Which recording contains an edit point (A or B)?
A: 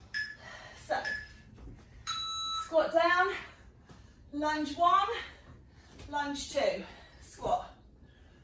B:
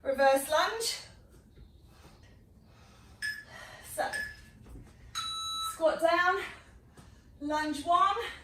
B